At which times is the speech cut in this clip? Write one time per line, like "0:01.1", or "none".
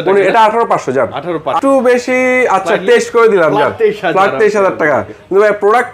0:01.5